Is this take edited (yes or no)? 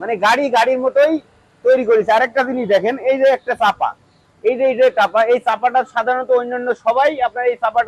no